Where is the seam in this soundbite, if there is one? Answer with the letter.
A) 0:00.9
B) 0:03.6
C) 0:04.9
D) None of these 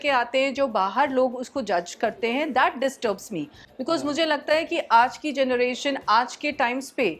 D